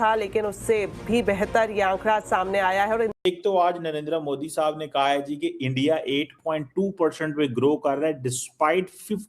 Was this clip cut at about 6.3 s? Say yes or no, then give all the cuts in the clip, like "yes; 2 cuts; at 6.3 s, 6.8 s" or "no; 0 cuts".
no; 1 cut; at 3.2 s